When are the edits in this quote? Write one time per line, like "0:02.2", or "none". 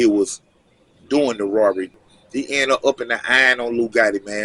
0:01.9

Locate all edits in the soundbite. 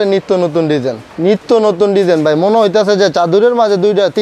0:01.0

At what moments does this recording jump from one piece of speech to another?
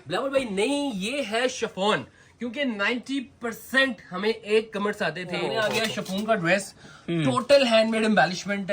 0:05.5

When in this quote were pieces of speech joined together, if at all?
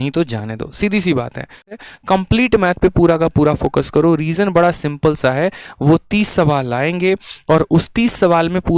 0:01.7

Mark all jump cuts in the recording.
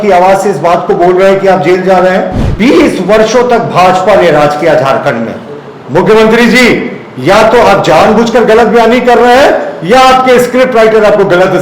0:02.4

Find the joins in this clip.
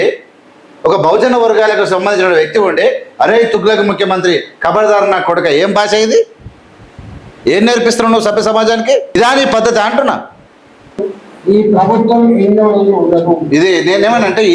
0:09.1
0:11.0

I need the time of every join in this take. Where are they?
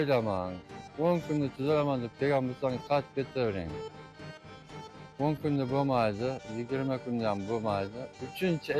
none

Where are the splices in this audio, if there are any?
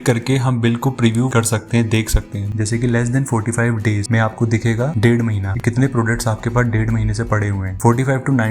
0:02.4

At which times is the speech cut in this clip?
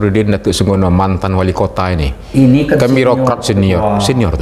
none

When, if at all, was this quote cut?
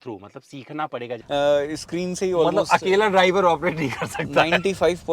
0:01.1

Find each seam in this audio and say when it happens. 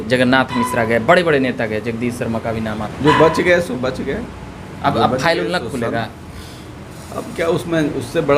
0:02.9

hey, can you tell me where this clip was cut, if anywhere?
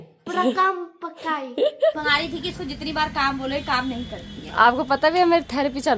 0:02.0

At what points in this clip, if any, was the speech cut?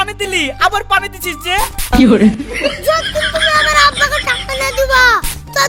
none

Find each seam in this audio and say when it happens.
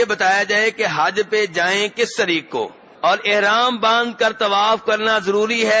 0:02.8

